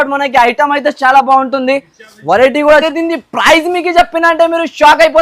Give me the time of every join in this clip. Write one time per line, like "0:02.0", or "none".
0:02.8